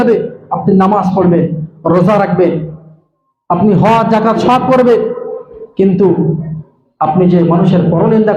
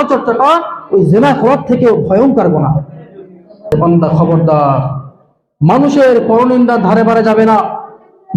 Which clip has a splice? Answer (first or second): second